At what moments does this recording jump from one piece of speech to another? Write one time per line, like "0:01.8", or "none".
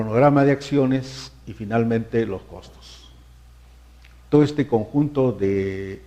0:02.3